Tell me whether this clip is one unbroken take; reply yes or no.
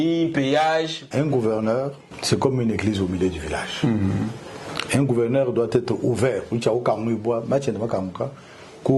no